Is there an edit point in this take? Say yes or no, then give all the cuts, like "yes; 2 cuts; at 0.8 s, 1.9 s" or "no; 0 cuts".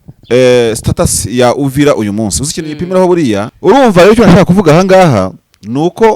yes; 1 cut; at 3.5 s